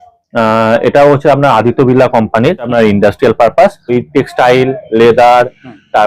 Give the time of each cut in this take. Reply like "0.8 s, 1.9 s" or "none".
2.7 s, 3.9 s